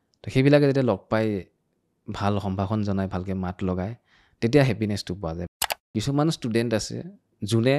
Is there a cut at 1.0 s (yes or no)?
no